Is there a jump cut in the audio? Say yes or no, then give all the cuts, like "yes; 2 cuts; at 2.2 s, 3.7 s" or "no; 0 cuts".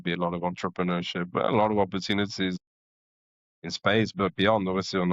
no; 0 cuts